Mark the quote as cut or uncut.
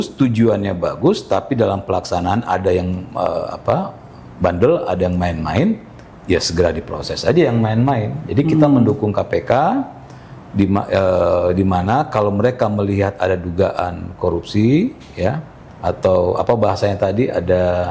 uncut